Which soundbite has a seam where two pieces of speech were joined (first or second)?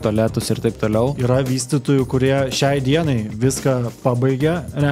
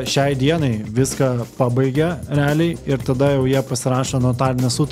first